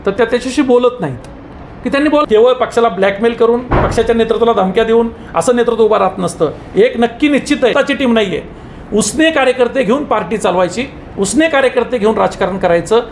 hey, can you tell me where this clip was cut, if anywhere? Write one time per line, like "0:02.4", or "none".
0:02.2
0:07.7

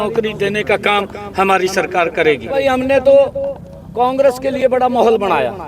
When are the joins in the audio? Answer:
0:02.6

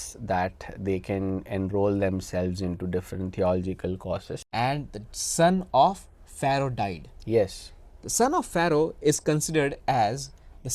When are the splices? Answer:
0:04.4

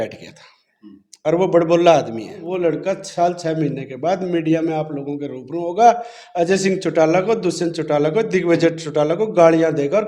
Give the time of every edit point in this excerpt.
0:02.4

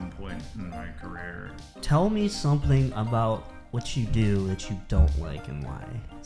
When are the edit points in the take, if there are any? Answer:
0:01.8

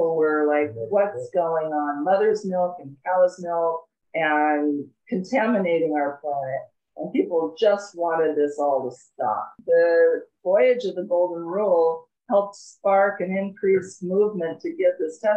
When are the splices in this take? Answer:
0:09.5

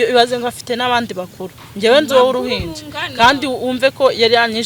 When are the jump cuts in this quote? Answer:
none

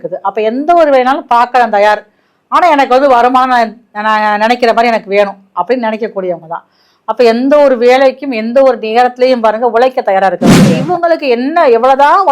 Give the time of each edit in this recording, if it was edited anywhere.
0:10.8

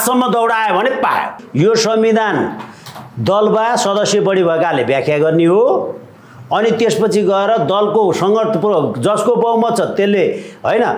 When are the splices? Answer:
0:01.4

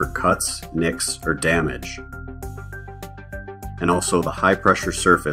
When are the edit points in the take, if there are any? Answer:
0:01.8
0:03.8

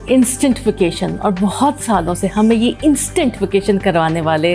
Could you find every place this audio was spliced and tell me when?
none

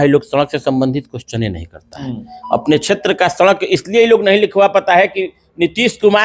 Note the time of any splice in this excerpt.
none

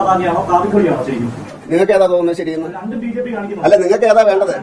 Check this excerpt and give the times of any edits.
none

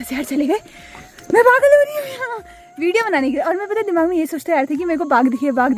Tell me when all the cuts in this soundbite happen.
none

